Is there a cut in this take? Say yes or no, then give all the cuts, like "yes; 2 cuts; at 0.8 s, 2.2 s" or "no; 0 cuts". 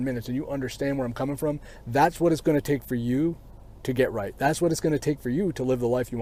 no; 0 cuts